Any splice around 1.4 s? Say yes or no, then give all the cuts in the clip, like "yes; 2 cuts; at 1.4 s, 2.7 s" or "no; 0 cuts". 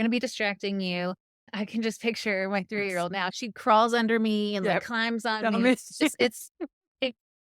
yes; 2 cuts; at 1.4 s, 3.3 s